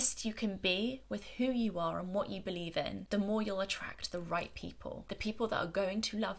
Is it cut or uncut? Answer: cut